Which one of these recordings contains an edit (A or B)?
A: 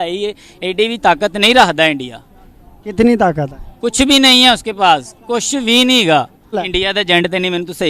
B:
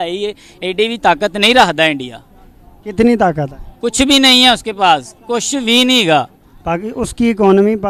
A